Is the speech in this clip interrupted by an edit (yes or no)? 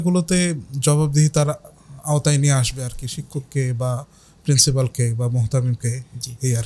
no